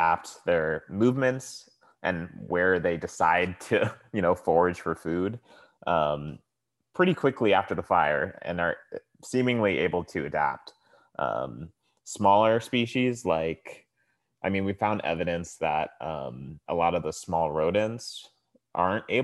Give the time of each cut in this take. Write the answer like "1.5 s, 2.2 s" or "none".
none